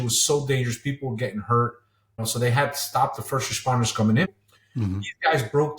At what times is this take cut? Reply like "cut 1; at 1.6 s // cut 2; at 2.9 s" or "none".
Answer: cut 1; at 4.3 s